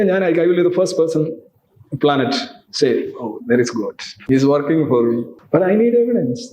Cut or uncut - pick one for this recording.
cut